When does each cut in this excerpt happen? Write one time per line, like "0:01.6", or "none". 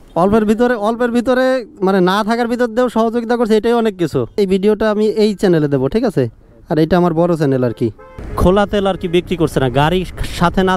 0:04.3
0:08.2

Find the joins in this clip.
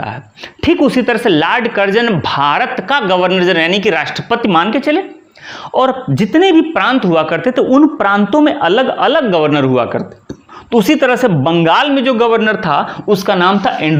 none

